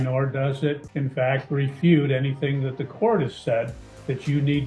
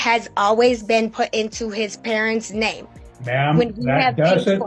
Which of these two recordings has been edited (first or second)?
first